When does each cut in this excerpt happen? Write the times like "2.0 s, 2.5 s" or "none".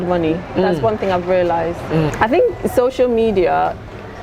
2.1 s